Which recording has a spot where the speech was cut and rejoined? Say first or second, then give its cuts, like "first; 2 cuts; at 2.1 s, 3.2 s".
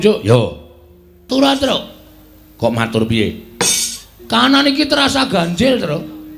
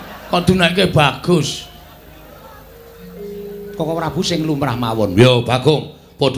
first; 1 cut; at 1.2 s